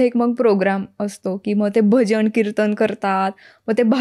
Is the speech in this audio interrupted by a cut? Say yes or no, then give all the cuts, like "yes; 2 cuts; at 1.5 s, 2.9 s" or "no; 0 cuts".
no; 0 cuts